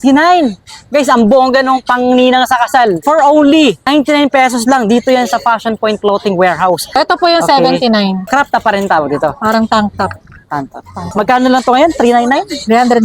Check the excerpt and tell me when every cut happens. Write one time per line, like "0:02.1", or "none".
0:03.0
0:03.8
0:06.9
0:08.2
0:11.0